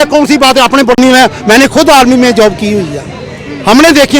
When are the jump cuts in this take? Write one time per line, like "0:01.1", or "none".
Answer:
0:00.9